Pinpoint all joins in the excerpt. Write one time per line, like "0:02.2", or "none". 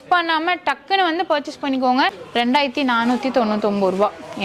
0:02.2